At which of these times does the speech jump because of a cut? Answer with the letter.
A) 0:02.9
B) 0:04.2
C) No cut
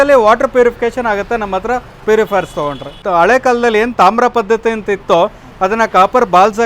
A